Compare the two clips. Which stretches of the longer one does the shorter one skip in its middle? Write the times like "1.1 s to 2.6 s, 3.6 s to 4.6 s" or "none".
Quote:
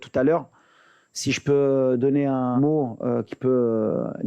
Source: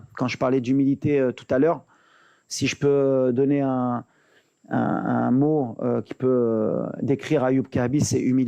3.9 s to 5.4 s